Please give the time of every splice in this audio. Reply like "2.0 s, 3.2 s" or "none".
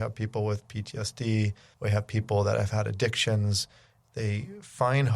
1.6 s